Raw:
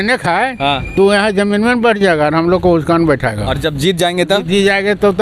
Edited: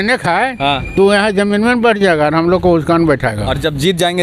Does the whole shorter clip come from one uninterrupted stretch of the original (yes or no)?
yes